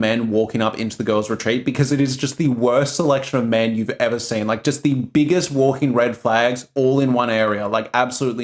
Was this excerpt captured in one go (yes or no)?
yes